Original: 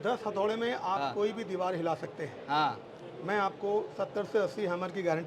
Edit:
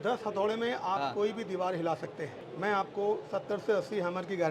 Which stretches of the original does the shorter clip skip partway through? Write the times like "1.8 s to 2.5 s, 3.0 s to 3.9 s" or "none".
2.3 s to 3.0 s